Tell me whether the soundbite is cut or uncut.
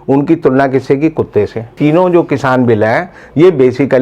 cut